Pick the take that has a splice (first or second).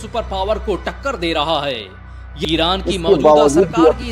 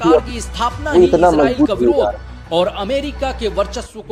first